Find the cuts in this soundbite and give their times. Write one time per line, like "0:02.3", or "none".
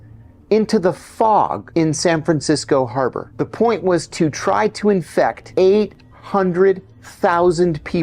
0:01.6
0:03.2
0:05.4